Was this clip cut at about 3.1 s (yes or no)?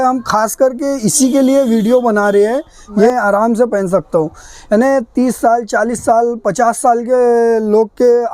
yes